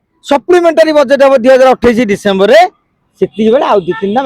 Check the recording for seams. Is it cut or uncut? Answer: uncut